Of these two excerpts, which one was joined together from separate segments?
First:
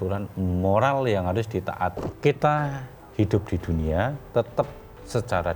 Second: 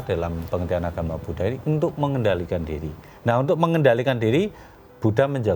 first; 1 cut; at 2.0 s

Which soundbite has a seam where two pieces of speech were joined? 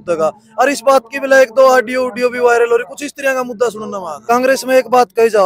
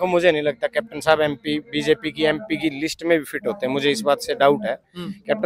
first; 1 cut; at 4.2 s

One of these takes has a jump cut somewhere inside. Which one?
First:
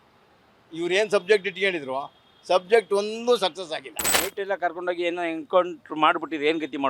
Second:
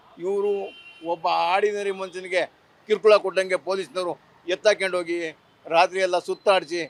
first; 1 cut; at 4.2 s

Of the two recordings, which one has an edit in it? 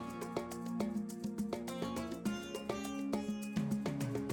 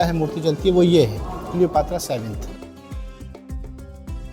second; 1 cut; at 2.4 s

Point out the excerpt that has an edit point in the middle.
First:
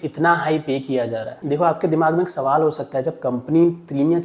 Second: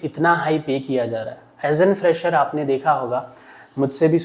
first; 1 cut; at 1.4 s

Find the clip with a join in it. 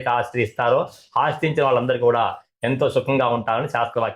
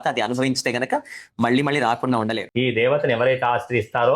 second; 1 cut; at 2.4 s

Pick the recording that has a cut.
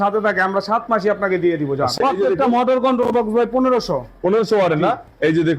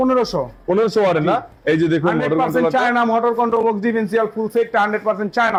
first; 1 cut; at 2.0 s

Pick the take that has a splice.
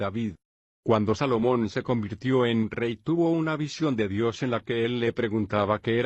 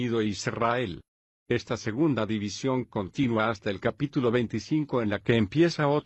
first; 1 cut; at 2.8 s

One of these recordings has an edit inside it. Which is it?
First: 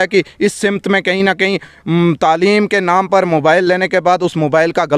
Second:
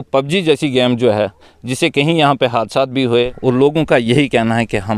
second; 1 cut; at 3.1 s

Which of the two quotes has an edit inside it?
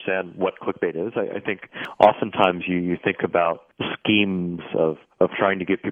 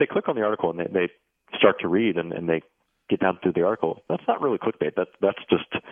first; 1 cut; at 1.8 s

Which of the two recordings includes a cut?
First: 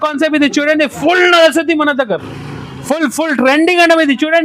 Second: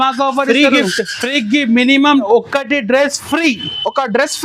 second; 1 cut; at 2.2 s

